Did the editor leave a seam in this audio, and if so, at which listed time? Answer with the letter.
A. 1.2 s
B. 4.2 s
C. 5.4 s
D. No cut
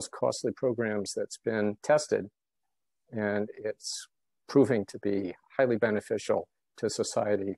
C